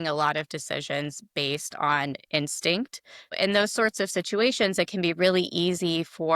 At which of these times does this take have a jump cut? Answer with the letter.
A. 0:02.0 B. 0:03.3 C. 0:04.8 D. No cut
B